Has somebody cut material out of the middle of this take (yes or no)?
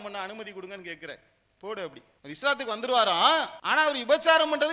yes